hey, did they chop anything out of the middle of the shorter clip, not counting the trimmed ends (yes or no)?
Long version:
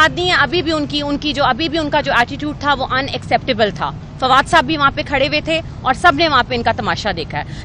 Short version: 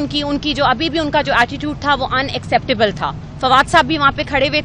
no